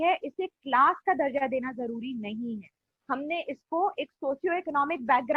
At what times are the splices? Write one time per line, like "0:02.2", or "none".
none